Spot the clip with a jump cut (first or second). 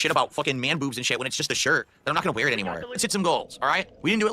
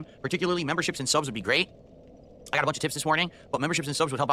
first